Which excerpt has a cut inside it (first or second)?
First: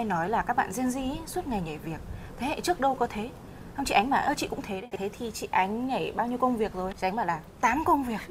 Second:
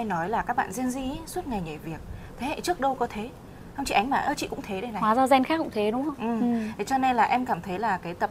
first